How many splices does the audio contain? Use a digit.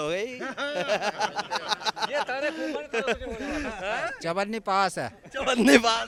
0